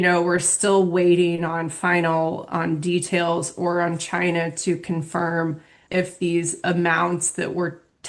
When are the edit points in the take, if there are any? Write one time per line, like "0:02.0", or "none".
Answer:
0:05.7